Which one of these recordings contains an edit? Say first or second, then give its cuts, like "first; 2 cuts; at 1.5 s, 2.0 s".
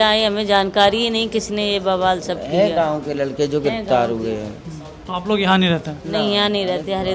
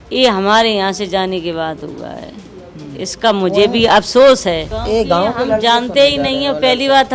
second; 1 cut; at 4.7 s